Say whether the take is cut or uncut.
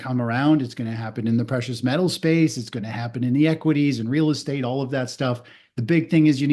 uncut